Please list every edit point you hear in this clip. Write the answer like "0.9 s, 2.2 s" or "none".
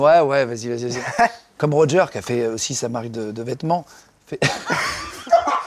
1.4 s